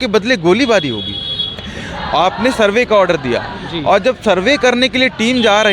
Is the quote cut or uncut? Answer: cut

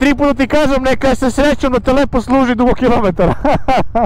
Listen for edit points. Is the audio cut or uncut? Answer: uncut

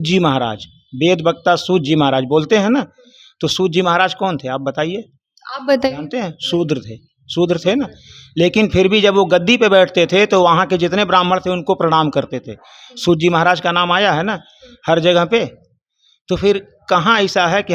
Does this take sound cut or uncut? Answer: uncut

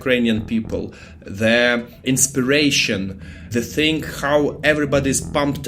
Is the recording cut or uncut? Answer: cut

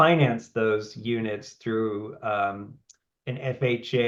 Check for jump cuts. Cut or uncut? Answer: uncut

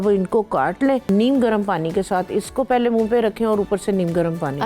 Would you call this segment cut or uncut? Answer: cut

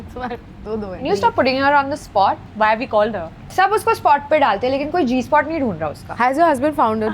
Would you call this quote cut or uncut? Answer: cut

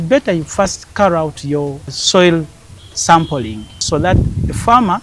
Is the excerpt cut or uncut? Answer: cut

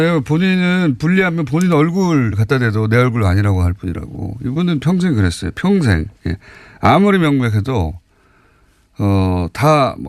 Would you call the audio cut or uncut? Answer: cut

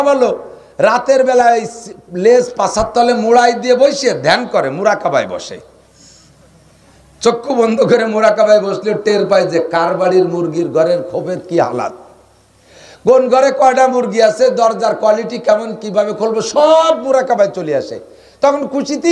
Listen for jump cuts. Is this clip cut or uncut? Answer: uncut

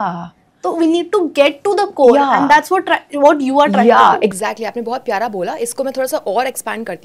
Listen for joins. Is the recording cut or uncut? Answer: uncut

